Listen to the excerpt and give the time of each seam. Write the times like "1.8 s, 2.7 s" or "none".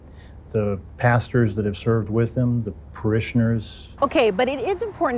3.8 s